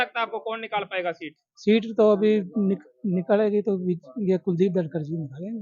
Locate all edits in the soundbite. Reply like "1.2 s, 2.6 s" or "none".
none